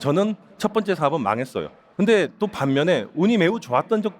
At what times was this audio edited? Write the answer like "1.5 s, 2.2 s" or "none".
1.8 s